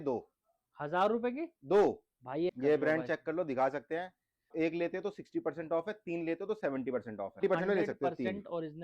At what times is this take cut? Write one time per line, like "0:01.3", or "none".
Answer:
0:02.5
0:04.5
0:07.4